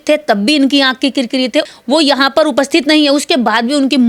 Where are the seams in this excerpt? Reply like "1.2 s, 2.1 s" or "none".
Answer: none